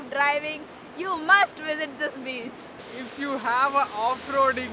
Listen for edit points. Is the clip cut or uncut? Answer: cut